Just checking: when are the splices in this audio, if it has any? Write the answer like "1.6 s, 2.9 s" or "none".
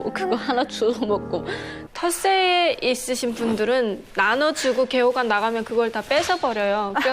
1.8 s